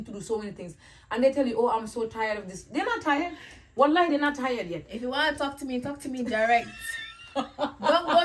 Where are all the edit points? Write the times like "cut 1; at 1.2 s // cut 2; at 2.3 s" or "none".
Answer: none